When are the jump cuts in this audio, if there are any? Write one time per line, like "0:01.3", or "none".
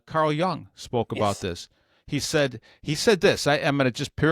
none